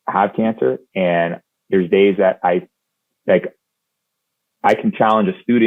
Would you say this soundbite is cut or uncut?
uncut